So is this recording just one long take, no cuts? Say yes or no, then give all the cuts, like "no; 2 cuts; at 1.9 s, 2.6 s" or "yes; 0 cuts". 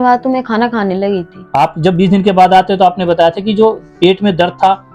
no; 1 cut; at 1.3 s